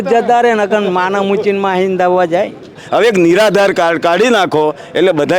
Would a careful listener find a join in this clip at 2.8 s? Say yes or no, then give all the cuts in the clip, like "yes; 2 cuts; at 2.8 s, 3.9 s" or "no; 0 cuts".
yes; 1 cut; at 2.8 s